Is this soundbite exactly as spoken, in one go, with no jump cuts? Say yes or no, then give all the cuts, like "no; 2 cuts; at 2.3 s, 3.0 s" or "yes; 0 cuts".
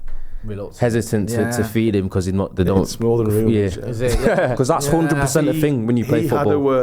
no; 1 cut; at 4.5 s